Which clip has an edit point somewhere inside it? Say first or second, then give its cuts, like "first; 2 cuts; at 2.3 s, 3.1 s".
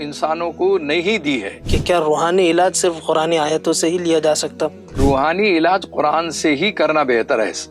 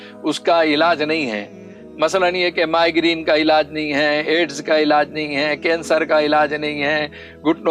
first; 2 cuts; at 1.7 s, 5.0 s